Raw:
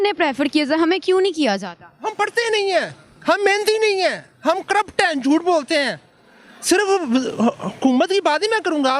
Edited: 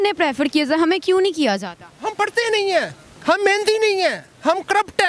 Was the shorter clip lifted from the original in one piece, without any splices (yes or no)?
yes